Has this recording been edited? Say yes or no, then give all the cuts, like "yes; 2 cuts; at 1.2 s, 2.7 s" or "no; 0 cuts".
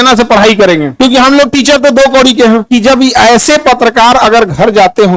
yes; 1 cut; at 2.6 s